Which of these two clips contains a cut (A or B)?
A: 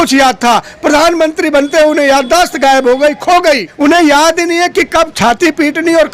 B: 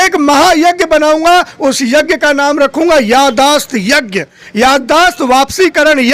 A